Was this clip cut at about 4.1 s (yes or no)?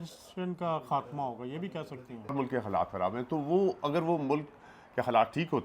no